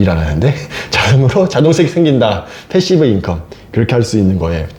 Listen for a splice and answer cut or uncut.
uncut